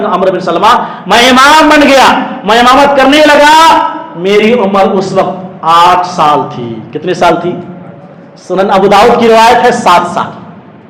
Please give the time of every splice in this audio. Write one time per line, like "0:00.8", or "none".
none